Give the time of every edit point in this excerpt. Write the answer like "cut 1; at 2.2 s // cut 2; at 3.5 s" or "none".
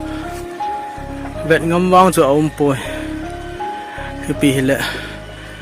cut 1; at 1.5 s // cut 2; at 2.8 s // cut 3; at 4.2 s